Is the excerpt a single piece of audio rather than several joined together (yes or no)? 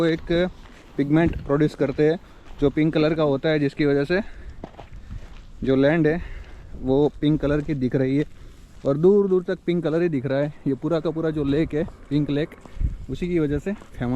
yes